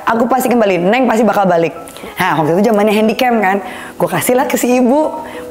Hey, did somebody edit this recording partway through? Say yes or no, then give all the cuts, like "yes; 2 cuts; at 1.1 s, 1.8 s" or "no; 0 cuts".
yes; 1 cut; at 1.9 s